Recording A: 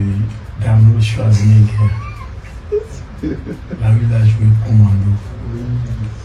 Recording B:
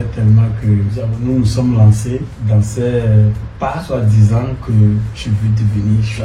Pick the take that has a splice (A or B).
B